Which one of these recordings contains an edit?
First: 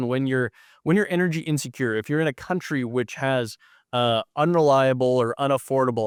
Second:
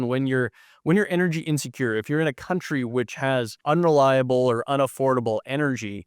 second; 1 cut; at 3.6 s

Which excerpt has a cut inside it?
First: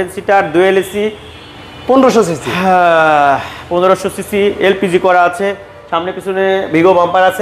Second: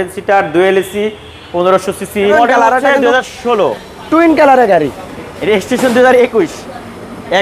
second; 2 cuts; at 1.4 s, 2.3 s

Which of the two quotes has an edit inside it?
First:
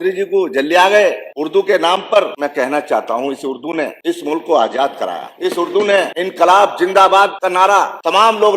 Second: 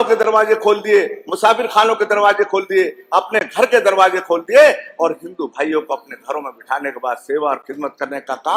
first; 6 cuts; at 1.3 s, 2.3 s, 4.0 s, 5.3 s, 6.1 s, 7.6 s

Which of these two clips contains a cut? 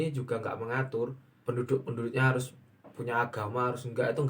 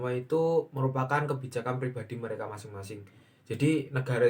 first; 1 cut; at 1.3 s

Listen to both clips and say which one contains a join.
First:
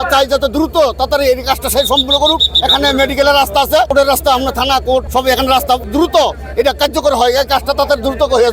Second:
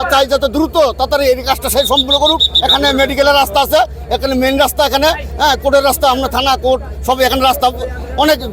first; 3 cuts; at 3.9 s, 5.1 s, 5.9 s

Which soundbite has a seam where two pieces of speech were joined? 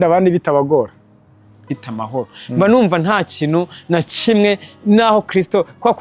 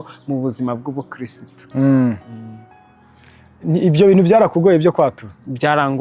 first; 1 cut; at 1.6 s

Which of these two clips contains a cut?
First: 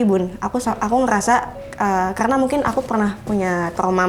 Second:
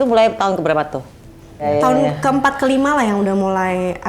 second; 1 cut; at 1.6 s

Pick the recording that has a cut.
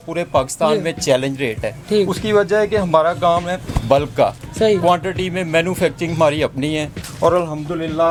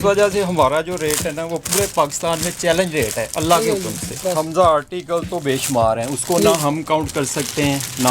second; 1 cut; at 4.2 s

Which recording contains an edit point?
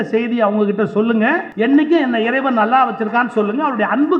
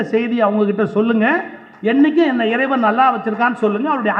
first; 1 cut; at 1.5 s

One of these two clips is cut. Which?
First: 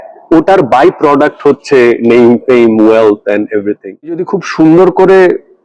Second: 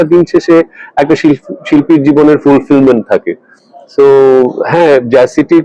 first; 1 cut; at 4.2 s

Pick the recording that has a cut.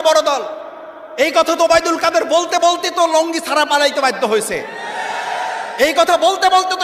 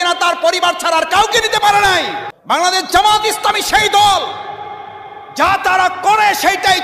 second; 1 cut; at 2.3 s

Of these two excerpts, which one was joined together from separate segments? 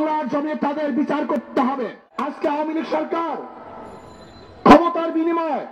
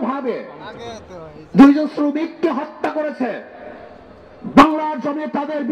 first; 1 cut; at 2.2 s

